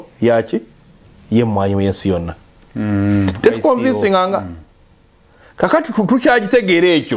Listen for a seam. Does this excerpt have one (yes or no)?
no